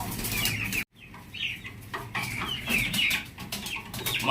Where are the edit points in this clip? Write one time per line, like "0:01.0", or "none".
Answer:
0:00.9